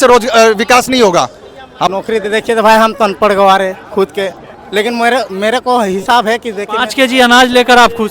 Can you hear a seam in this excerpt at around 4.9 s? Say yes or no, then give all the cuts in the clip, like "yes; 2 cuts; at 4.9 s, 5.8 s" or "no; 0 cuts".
no; 1 cut; at 1.9 s